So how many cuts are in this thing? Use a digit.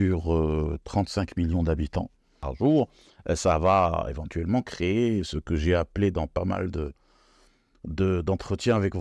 1